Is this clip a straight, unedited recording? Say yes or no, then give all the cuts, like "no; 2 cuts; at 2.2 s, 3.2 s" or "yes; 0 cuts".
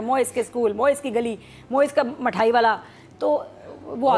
yes; 0 cuts